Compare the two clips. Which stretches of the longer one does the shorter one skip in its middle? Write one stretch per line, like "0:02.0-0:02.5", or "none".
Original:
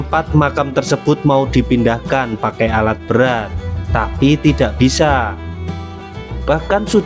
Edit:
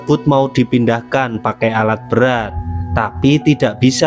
none